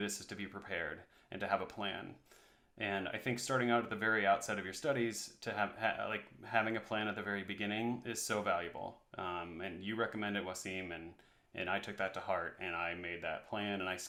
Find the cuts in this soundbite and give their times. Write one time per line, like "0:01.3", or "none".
none